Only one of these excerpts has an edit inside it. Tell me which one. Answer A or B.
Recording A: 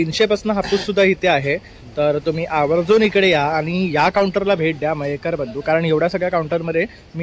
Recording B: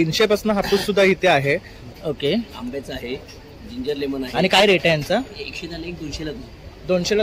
B